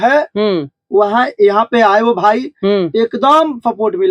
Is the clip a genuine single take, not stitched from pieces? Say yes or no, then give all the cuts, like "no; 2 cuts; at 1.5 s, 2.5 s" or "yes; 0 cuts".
yes; 0 cuts